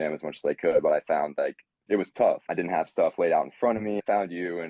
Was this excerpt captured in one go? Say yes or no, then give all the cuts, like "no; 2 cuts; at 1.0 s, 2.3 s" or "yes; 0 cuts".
no; 3 cuts; at 1.8 s, 2.4 s, 4.0 s